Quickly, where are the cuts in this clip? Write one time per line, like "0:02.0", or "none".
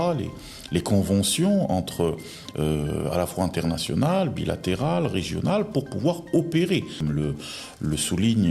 0:07.0